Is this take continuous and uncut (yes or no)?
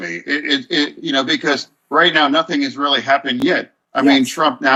yes